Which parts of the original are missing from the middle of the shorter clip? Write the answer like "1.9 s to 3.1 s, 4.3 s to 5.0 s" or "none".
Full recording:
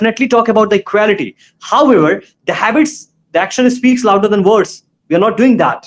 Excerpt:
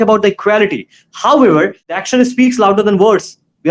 2.4 s to 3.3 s